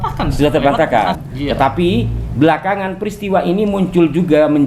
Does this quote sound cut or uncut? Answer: cut